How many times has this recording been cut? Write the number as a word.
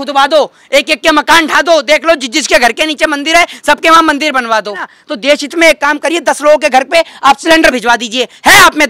one